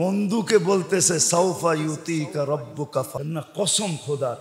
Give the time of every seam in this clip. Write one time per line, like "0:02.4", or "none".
0:03.1